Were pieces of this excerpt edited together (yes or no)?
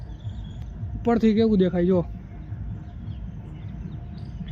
no